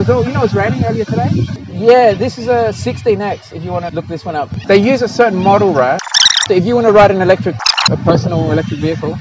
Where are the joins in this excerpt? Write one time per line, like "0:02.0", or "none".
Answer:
0:01.5
0:04.0
0:06.4
0:07.9